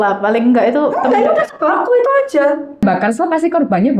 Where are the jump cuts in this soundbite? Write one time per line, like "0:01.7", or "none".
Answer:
0:02.8